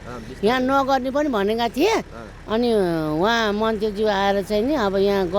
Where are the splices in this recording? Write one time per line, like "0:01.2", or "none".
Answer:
none